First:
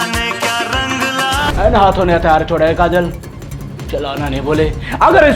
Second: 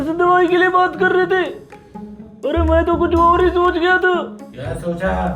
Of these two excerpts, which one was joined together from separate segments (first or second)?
first